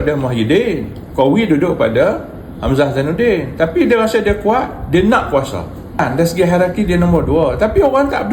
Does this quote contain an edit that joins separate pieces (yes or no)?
yes